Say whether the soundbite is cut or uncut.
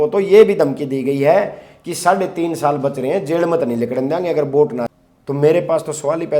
cut